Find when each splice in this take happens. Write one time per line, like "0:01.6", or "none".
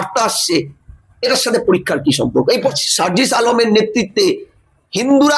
0:02.6